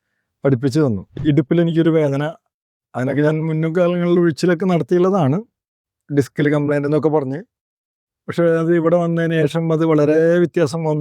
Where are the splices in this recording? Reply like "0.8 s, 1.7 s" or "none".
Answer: 1.2 s